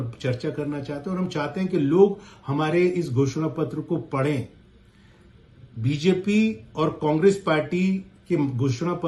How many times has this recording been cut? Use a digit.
0